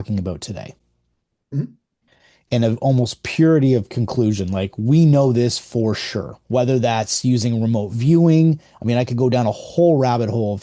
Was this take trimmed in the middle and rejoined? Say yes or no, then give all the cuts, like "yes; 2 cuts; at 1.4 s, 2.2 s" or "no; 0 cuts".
no; 0 cuts